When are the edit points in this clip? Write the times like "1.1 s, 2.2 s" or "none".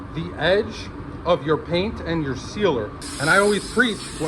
3.0 s

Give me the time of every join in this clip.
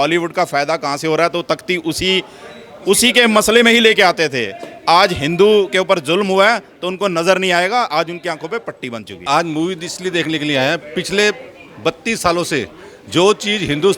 9.1 s

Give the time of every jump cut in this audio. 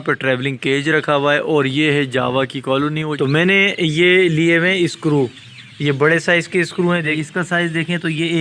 3.1 s, 7.1 s

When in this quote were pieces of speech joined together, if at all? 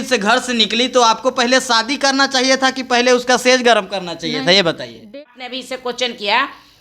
5.0 s

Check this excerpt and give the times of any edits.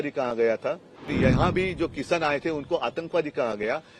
1.1 s

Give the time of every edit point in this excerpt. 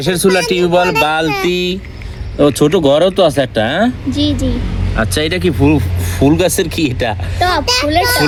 none

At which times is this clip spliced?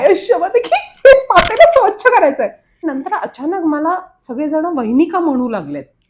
2.7 s

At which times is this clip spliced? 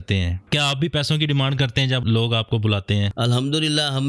3.1 s

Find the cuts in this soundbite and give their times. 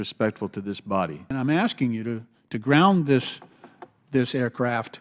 1.2 s

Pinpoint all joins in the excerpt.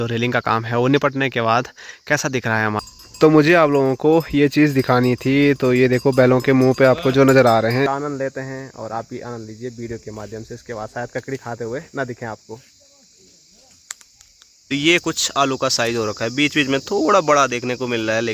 2.8 s, 7.8 s, 14.5 s

